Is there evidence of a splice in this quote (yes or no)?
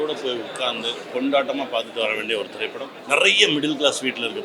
yes